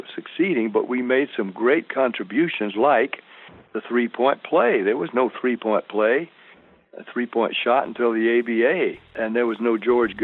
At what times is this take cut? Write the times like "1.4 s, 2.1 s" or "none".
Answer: 9.1 s